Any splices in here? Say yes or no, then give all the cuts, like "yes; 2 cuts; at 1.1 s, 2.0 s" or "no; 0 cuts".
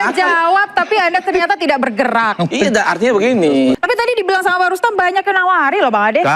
yes; 1 cut; at 3.8 s